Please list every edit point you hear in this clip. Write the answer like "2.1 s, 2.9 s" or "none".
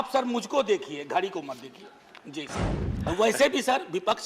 2.8 s